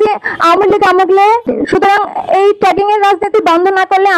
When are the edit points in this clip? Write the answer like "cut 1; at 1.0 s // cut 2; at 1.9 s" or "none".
cut 1; at 1.5 s